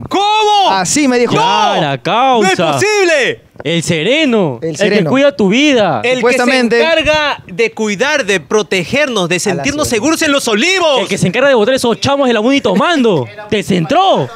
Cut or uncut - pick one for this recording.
uncut